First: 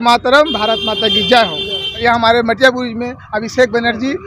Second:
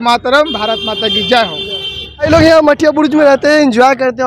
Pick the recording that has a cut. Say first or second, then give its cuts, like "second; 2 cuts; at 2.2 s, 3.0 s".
first; 1 cut; at 2.0 s